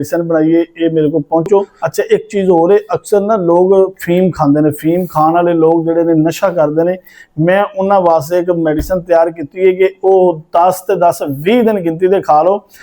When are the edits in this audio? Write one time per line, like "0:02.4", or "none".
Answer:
0:01.8